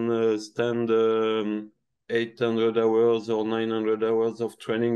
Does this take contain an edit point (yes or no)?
no